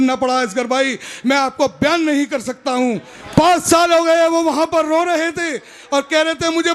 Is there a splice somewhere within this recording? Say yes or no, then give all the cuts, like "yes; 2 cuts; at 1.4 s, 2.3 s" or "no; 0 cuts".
yes; 1 cut; at 3.1 s